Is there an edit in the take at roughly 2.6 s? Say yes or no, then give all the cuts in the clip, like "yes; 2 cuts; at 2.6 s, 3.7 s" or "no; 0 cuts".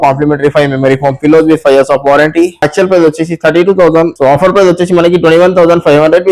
yes; 1 cut; at 2.6 s